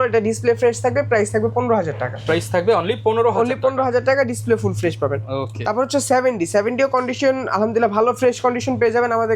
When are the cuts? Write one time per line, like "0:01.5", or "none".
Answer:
none